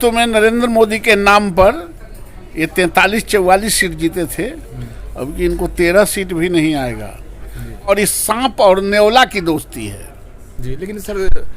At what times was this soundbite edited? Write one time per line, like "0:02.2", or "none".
0:07.9